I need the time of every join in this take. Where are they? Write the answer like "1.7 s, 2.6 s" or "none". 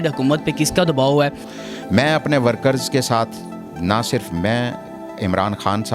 1.5 s